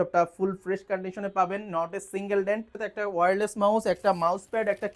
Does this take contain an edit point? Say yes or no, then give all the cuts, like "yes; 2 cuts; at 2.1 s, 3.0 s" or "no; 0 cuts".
yes; 1 cut; at 2.8 s